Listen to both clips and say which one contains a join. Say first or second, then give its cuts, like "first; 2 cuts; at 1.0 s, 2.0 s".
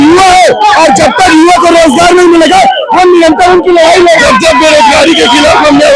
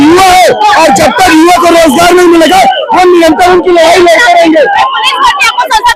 first; 1 cut; at 4.2 s